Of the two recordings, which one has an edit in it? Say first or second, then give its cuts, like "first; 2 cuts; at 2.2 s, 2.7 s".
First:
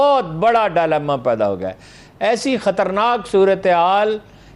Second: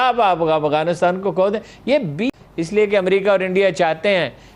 second; 1 cut; at 2.2 s